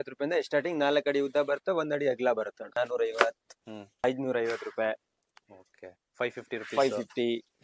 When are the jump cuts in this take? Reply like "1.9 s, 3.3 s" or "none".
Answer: 2.7 s, 4.0 s